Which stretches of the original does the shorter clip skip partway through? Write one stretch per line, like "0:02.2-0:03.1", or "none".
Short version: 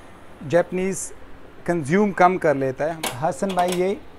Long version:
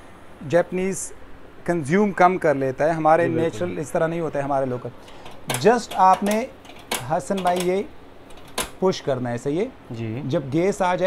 0:02.9-0:06.8